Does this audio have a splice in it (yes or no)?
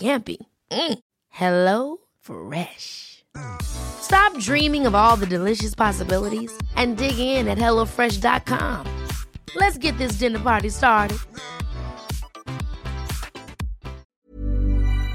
yes